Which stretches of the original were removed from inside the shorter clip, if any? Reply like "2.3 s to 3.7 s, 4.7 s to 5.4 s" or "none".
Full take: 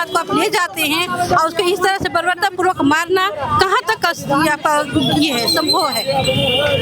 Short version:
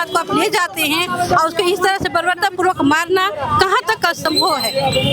4.2 s to 5.5 s